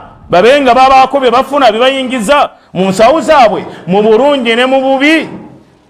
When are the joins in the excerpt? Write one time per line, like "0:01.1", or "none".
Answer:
none